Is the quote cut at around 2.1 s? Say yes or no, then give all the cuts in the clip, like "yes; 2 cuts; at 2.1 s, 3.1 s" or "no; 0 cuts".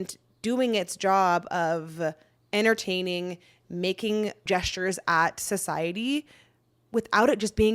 no; 1 cut; at 4.4 s